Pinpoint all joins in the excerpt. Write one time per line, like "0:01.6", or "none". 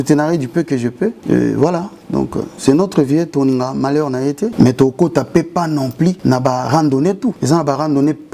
0:01.2
0:04.5
0:06.2
0:07.4